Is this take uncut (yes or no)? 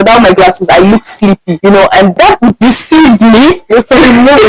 no